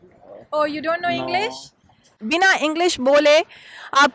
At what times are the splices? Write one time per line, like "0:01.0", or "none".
0:02.2